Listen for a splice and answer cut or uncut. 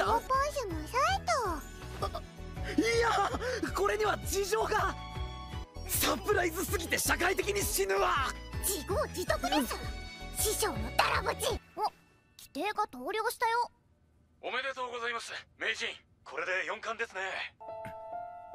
cut